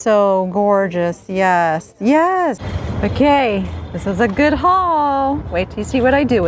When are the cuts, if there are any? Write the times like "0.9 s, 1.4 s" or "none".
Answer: 2.6 s